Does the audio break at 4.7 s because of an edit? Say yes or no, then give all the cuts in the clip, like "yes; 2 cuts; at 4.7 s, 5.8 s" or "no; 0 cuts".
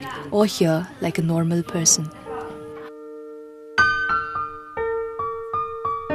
no; 1 cut; at 1.9 s